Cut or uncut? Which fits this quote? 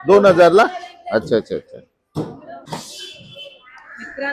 cut